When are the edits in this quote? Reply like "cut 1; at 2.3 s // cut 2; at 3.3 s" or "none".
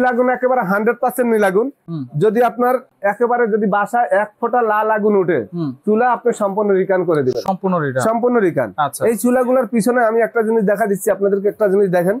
none

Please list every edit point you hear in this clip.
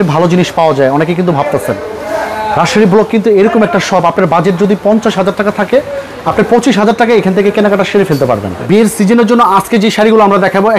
cut 1; at 8.5 s

